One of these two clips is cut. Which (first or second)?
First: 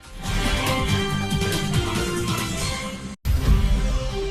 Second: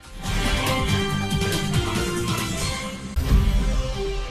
second